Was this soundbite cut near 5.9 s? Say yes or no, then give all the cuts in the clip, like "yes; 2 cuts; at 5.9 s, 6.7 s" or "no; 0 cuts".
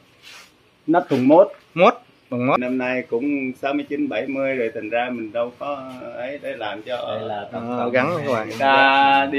no; 1 cut; at 2.6 s